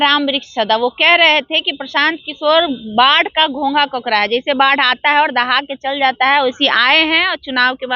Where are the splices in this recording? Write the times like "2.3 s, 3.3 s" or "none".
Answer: none